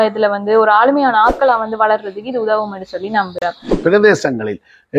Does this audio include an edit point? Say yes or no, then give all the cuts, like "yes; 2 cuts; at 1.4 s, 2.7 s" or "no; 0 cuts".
yes; 1 cut; at 3.8 s